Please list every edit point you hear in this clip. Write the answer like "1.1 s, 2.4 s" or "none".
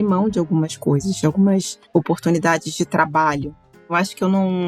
1.8 s, 3.7 s